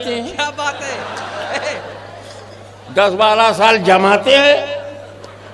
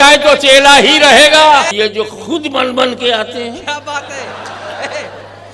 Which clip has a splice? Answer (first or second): second